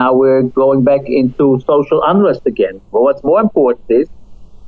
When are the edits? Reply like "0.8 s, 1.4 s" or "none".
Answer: none